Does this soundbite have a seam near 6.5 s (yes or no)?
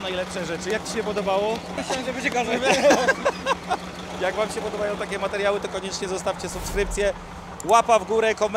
no